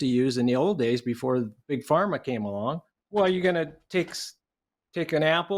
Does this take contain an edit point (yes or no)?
yes